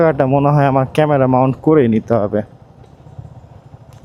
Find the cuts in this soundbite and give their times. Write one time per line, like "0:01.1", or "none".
none